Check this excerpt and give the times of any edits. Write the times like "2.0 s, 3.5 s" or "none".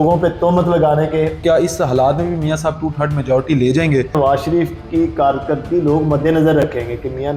1.4 s, 4.1 s

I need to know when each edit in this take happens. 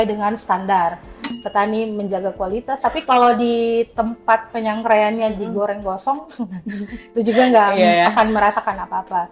1.4 s

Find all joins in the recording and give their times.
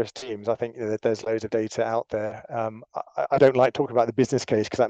none

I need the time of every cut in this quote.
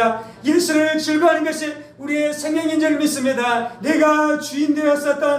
3.7 s

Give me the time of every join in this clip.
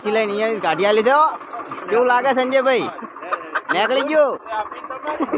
1.7 s, 4.4 s

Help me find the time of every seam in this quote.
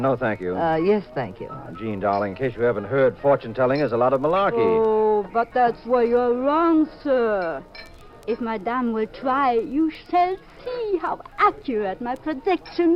none

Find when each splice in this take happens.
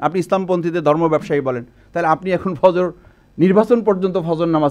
none

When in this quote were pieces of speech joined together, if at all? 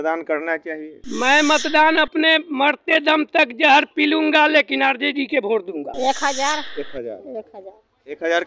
5.9 s

